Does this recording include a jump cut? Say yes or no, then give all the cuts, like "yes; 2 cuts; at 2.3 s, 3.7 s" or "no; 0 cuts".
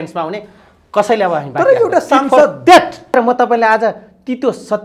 yes; 1 cut; at 3.1 s